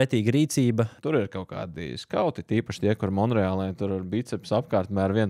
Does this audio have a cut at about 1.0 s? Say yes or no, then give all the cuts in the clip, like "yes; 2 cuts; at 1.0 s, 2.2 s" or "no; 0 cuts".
yes; 1 cut; at 1.0 s